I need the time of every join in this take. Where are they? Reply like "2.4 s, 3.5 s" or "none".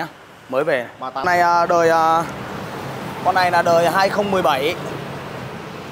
1.2 s